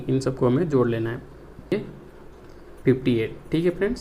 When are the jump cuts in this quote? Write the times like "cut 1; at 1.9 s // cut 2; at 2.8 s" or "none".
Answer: cut 1; at 1.7 s